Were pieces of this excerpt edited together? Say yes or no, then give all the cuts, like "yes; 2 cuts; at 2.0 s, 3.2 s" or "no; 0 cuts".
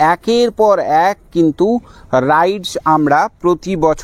no; 0 cuts